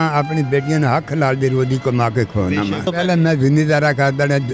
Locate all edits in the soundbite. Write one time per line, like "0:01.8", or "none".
0:02.9